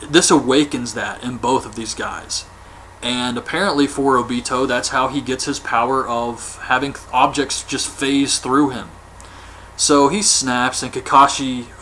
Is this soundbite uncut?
no; 1 cut; at 5.9 s

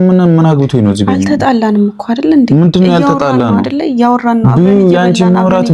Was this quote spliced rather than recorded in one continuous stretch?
no; 0 cuts

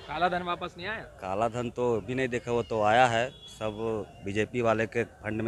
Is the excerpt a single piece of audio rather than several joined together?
yes; 0 cuts

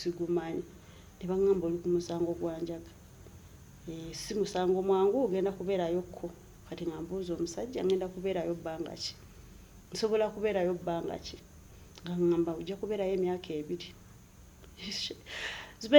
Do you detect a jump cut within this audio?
no; 0 cuts

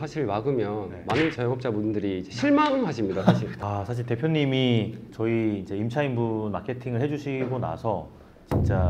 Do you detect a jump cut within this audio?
yes; 1 cut; at 3.5 s

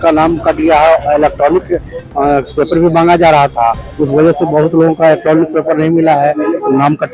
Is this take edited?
no; 0 cuts

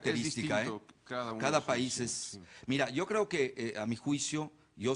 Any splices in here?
yes; 1 cut; at 1.0 s

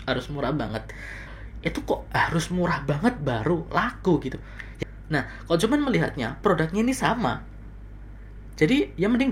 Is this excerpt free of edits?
no; 2 cuts; at 1.2 s, 4.6 s

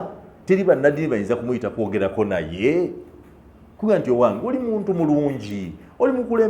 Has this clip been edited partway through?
no; 0 cuts

